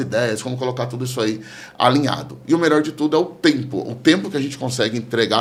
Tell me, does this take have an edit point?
no; 0 cuts

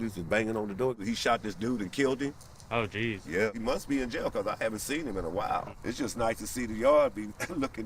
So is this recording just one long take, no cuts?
no; 3 cuts; at 1.0 s, 3.5 s, 5.7 s

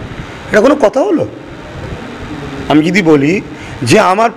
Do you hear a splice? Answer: no; 0 cuts

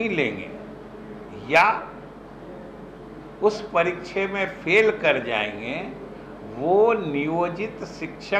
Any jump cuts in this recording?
no; 0 cuts

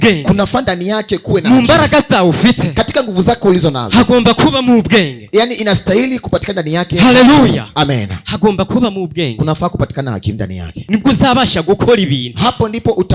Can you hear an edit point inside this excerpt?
yes; 1 cut; at 10.7 s

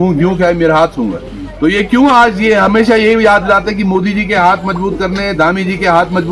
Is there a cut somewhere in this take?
no; 0 cuts

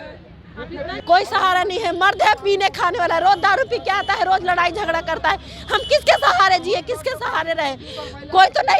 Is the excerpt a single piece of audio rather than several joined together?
no; 1 cut; at 1.0 s

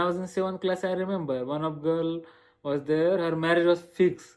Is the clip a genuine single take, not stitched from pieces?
yes; 0 cuts

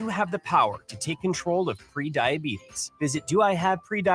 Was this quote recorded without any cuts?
yes; 0 cuts

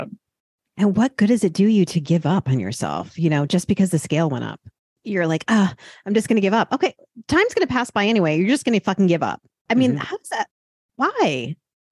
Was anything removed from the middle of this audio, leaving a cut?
no; 0 cuts

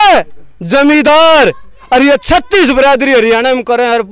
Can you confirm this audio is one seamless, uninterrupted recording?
yes; 0 cuts

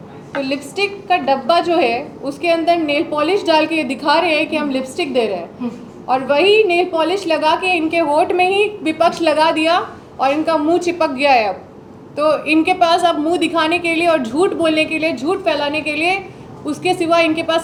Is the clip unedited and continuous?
yes; 0 cuts

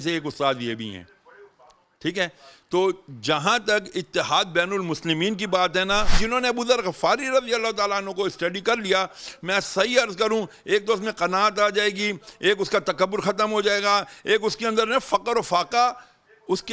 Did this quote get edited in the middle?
yes; 1 cut; at 6.1 s

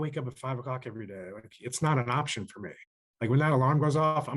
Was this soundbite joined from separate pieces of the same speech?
no; 0 cuts

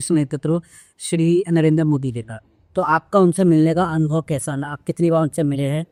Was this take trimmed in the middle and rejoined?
no; 0 cuts

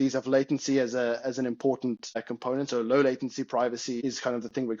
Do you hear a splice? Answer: yes; 2 cuts; at 2.2 s, 4.0 s

